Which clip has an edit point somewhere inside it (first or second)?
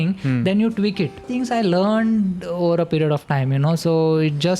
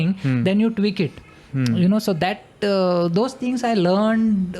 first